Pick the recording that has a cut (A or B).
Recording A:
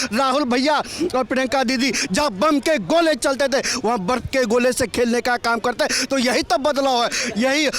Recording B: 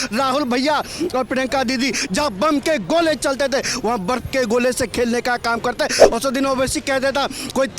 B